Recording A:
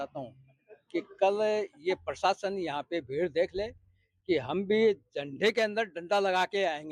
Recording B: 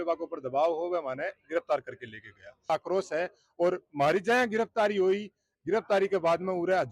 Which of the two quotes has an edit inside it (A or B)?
B